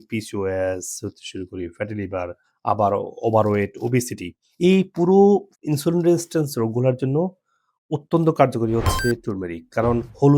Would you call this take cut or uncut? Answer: uncut